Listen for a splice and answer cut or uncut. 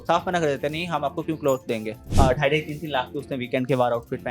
cut